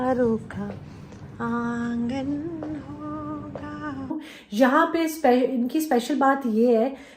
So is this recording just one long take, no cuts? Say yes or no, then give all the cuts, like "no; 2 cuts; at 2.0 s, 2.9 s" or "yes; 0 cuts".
no; 1 cut; at 4.3 s